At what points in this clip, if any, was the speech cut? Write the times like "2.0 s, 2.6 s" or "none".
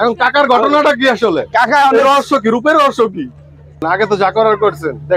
3.8 s